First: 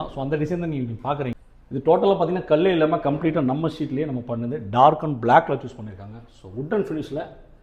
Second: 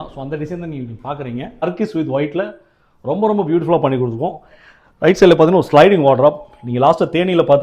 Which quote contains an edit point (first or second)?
second